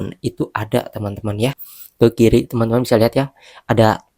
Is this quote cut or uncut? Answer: cut